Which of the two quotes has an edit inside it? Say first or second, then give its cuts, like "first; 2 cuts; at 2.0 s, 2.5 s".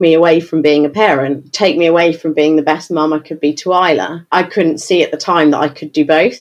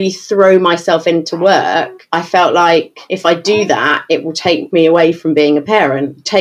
second; 2 cuts; at 2.0 s, 3.0 s